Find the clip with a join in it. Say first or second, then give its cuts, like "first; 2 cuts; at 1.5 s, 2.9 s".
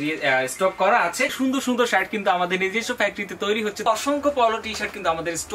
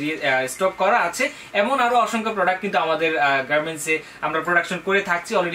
first; 2 cuts; at 1.3 s, 3.9 s